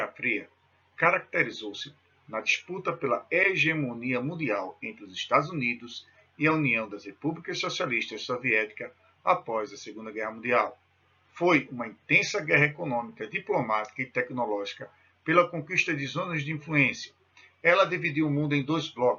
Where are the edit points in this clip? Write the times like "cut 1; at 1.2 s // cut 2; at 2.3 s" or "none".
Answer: none